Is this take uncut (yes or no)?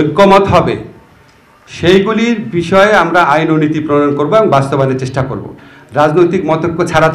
yes